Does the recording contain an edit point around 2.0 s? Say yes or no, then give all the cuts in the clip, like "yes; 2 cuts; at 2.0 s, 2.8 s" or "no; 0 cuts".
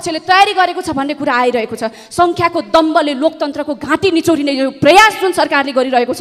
no; 0 cuts